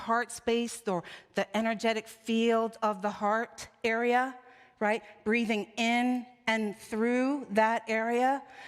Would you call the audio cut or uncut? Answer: uncut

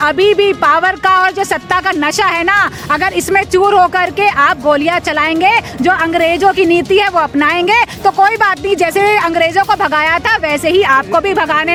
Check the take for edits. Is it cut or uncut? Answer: uncut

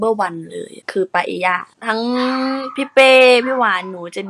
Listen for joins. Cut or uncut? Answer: cut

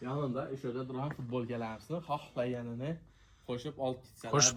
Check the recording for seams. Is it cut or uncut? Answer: uncut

